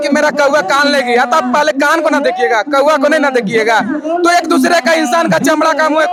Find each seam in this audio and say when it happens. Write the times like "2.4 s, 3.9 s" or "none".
none